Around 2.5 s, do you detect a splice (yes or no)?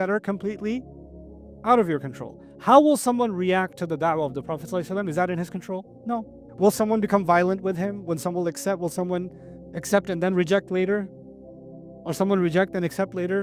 no